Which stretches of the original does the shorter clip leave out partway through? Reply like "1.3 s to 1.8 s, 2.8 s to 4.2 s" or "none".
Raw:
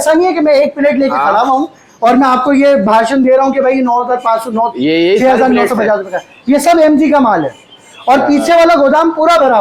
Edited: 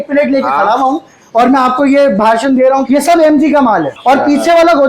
3.5 s to 6.4 s, 7.5 s to 7.9 s